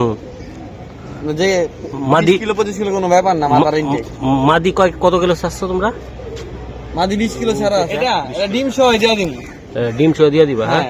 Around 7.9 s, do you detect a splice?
yes; 1 cut; at 7.9 s

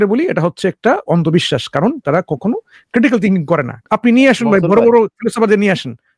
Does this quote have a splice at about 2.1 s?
no; 1 cut; at 3.8 s

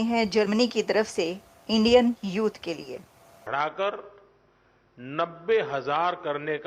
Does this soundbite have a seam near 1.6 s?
no; 1 cut; at 3.4 s

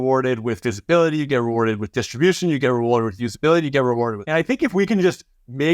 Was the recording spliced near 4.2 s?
yes; 1 cut; at 4.2 s

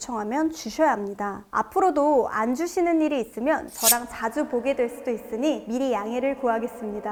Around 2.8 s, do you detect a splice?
no; 0 cuts

